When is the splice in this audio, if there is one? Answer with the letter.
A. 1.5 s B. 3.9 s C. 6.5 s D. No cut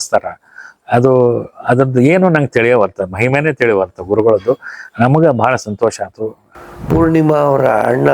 C